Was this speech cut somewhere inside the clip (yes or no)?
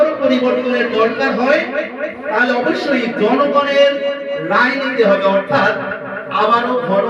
no